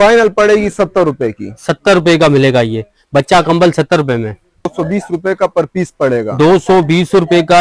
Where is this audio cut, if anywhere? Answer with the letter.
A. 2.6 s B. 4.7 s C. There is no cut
B